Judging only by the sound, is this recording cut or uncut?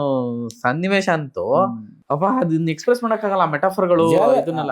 cut